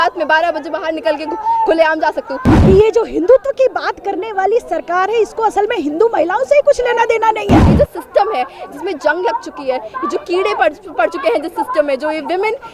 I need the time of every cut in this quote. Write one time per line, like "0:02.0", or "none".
0:02.5
0:07.7